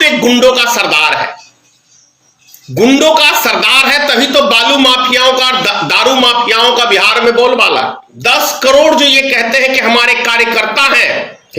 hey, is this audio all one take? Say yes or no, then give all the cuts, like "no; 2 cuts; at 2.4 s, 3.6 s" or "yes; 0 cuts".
no; 1 cut; at 8.1 s